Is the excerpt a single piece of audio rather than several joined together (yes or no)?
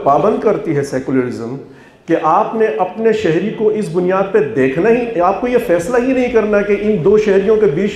yes